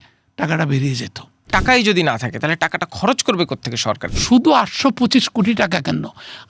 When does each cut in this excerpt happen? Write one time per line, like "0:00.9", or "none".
0:01.5
0:04.1